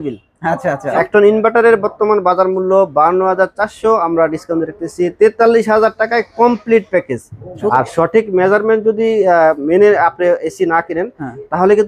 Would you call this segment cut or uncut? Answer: cut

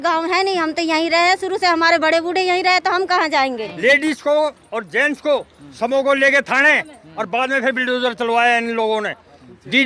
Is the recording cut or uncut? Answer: cut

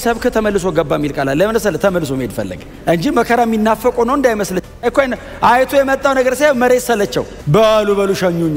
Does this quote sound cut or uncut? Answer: uncut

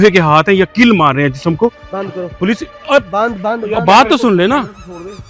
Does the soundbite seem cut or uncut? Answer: cut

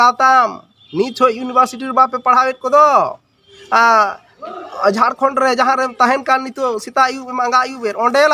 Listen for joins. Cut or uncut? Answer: uncut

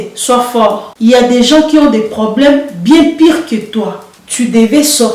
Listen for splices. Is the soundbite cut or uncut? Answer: cut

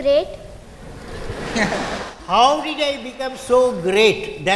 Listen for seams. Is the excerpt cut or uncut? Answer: uncut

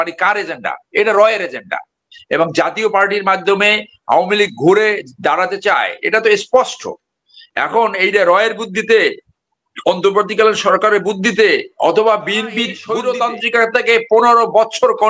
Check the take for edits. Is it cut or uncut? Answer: cut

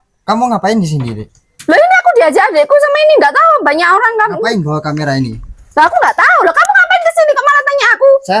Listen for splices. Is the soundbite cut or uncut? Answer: uncut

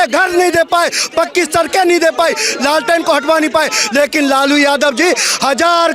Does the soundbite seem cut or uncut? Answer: uncut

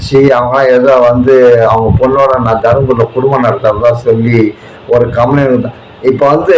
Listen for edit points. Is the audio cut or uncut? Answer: uncut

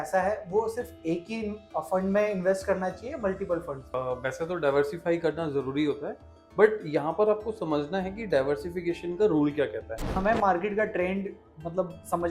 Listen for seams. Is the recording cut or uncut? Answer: cut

